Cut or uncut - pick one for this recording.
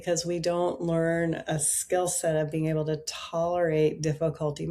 uncut